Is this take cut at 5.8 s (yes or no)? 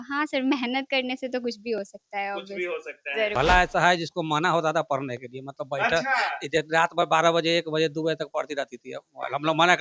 no